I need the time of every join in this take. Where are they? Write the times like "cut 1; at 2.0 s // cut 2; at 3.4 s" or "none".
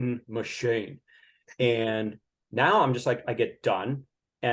none